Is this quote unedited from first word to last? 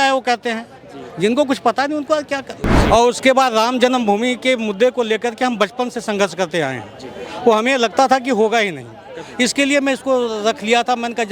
no; 1 cut; at 2.7 s

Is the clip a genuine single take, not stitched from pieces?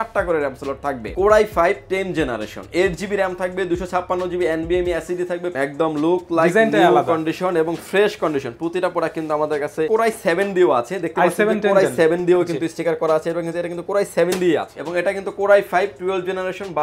no; 4 cuts; at 1.1 s, 5.5 s, 9.9 s, 14.8 s

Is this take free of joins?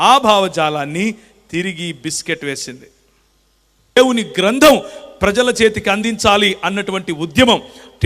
no; 1 cut; at 4.0 s

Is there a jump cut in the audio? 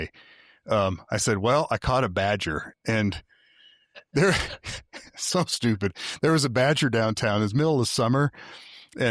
no; 0 cuts

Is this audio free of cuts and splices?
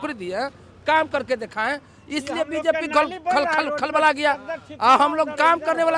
yes; 0 cuts

